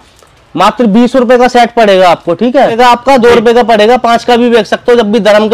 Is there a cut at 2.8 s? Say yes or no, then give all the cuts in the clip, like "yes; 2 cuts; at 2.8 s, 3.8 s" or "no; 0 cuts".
yes; 1 cut; at 2.8 s